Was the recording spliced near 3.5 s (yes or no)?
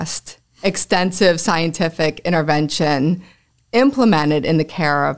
yes